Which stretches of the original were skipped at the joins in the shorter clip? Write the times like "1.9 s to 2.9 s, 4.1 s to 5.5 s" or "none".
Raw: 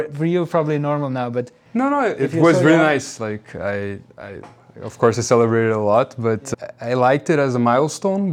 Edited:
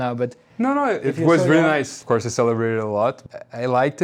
3.1 s to 4.9 s, 6.2 s to 6.5 s